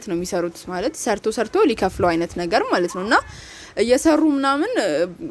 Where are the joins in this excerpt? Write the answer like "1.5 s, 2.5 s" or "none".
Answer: none